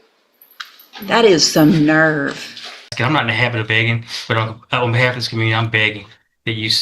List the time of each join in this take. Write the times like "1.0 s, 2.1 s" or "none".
2.9 s